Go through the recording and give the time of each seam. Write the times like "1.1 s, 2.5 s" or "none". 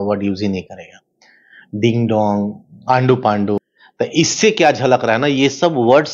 3.6 s